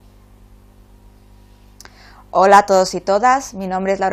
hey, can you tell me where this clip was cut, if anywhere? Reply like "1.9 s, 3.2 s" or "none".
none

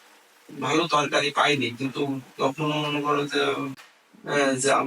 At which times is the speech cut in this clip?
3.7 s

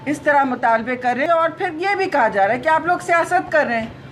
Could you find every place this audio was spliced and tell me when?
1.2 s

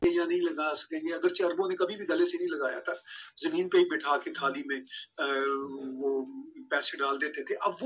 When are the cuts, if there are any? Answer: none

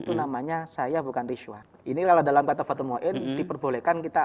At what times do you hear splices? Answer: 1.6 s

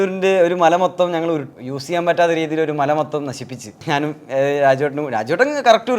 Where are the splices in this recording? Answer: 1.5 s, 3.8 s

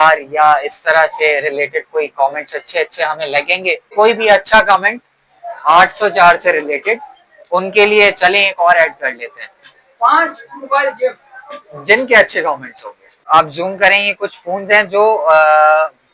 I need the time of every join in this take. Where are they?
3.9 s, 13.1 s

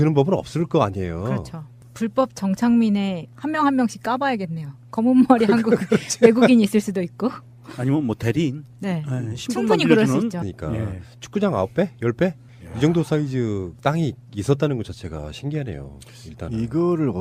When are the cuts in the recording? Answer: none

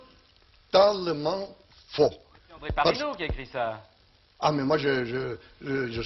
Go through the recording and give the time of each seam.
1.6 s

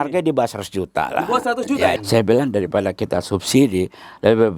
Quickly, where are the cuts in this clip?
2.0 s

